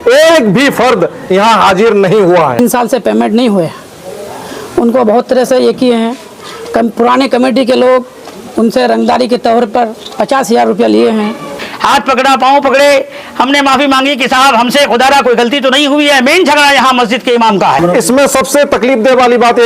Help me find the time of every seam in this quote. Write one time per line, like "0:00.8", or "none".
0:02.6
0:11.6
0:17.8